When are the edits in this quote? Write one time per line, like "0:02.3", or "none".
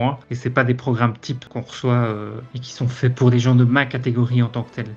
0:01.4
0:03.1